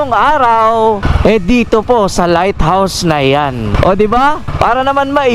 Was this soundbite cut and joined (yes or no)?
yes